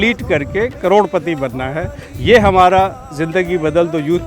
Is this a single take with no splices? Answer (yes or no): yes